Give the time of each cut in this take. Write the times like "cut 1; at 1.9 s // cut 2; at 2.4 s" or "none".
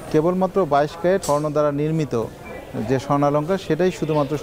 cut 1; at 1.2 s